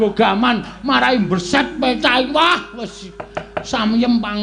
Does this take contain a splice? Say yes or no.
no